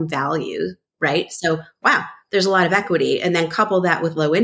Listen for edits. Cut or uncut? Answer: uncut